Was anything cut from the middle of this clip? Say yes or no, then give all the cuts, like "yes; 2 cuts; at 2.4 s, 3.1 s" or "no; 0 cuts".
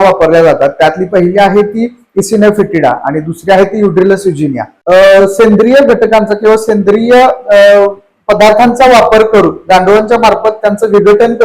yes; 1 cut; at 4.7 s